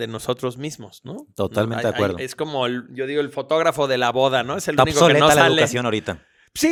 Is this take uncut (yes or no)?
yes